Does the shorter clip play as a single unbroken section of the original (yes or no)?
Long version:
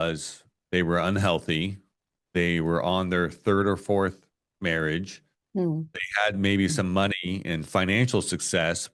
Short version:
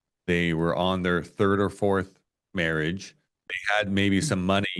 no